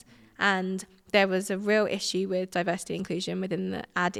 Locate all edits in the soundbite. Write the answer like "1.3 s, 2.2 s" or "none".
none